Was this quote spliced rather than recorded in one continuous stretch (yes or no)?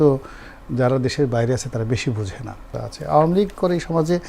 yes